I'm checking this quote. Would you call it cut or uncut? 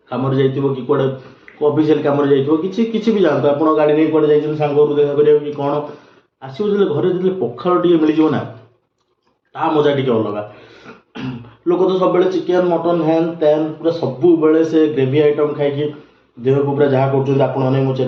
uncut